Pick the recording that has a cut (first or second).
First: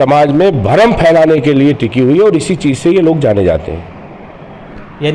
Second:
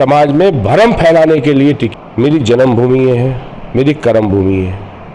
second